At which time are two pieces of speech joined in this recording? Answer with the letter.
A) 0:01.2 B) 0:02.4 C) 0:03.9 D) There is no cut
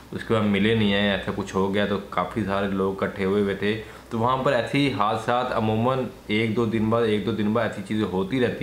D